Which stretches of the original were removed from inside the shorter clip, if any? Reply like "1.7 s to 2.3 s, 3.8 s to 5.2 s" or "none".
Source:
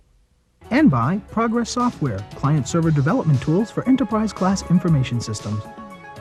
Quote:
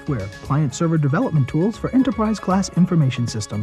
none